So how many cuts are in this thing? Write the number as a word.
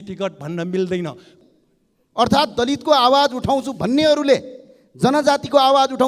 one